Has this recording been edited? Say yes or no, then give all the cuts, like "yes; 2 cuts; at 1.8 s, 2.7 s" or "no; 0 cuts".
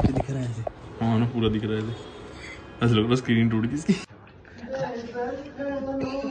no; 0 cuts